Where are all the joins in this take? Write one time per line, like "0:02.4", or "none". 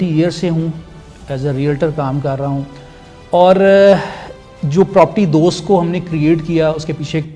none